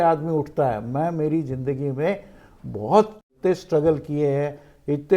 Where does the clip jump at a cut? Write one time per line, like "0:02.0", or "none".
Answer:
0:03.3